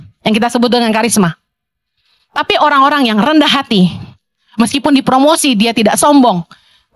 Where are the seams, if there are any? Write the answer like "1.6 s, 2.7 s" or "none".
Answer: none